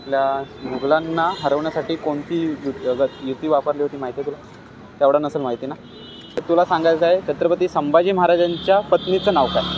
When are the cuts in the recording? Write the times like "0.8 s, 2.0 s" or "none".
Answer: 6.4 s